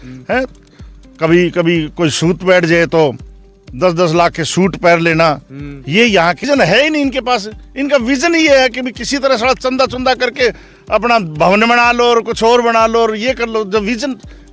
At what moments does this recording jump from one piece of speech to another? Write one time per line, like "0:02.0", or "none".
0:06.4